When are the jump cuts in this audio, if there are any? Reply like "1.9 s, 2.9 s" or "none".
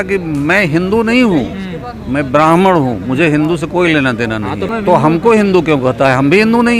4.7 s